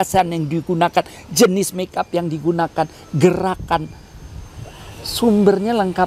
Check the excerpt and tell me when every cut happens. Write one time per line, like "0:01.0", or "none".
none

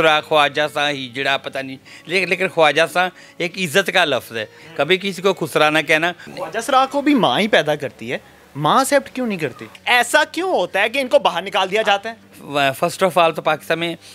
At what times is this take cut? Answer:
0:04.6
0:06.3
0:09.7
0:12.1

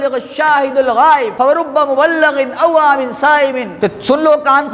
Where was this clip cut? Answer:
0:01.3
0:03.7

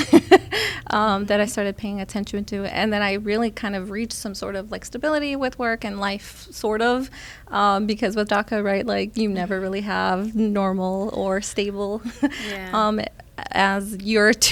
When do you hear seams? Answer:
none

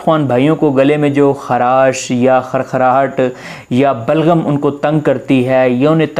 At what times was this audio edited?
none

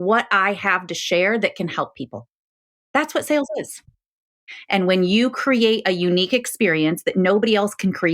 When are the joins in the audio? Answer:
0:04.4

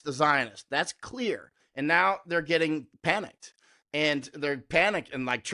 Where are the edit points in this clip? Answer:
0:01.6
0:02.9

